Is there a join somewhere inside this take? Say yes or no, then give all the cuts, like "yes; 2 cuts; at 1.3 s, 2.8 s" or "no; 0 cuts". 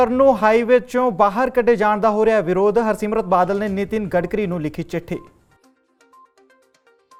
no; 0 cuts